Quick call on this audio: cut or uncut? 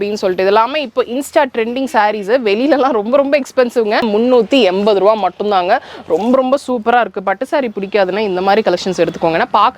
cut